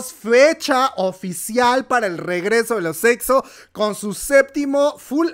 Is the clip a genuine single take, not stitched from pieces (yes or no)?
yes